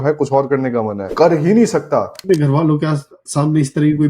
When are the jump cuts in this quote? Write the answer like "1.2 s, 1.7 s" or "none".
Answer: 1.0 s, 2.2 s